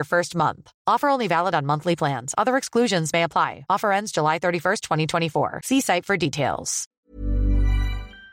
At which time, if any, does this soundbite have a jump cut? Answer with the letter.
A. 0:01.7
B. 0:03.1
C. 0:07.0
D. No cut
C